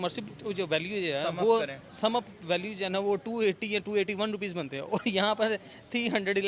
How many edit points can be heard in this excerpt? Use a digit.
0